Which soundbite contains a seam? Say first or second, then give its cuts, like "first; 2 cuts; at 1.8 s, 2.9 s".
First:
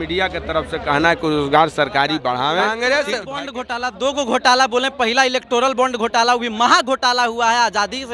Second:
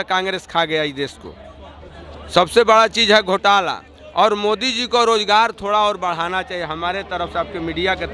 first; 1 cut; at 2.6 s